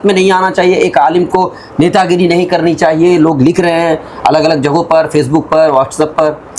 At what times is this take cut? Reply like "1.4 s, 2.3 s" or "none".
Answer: none